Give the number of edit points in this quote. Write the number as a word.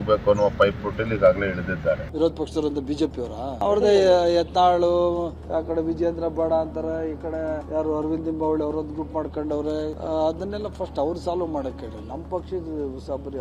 zero